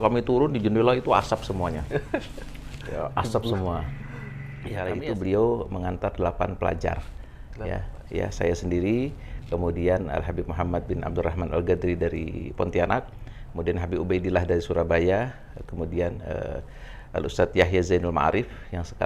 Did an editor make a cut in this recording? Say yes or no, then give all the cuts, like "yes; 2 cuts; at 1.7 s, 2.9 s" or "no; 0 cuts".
yes; 1 cut; at 4.8 s